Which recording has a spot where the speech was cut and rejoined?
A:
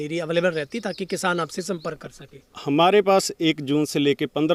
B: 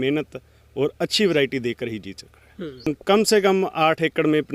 B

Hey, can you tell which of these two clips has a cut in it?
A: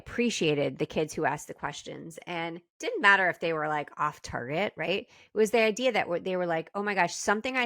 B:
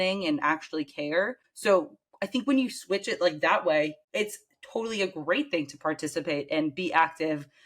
B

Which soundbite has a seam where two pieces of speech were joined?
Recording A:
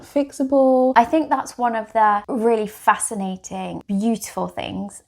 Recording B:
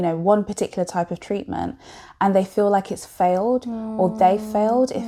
A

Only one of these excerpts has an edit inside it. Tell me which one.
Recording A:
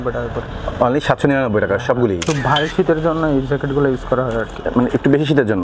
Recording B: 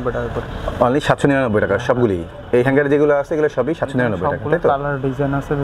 A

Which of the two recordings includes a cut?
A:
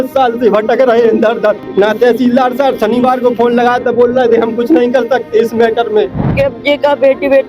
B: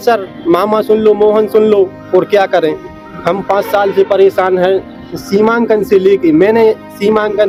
A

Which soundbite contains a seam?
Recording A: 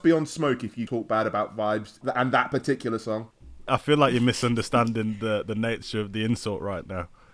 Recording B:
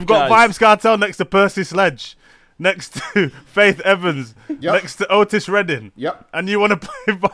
A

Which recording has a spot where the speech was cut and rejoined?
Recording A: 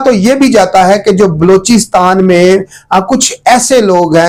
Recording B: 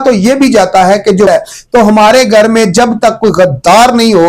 B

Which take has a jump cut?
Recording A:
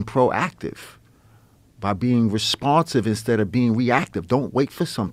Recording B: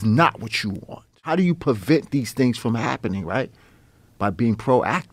B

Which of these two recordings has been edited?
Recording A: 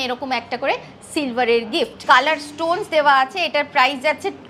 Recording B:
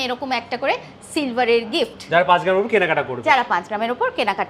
A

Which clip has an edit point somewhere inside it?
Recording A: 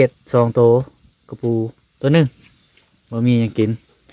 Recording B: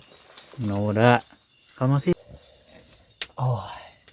B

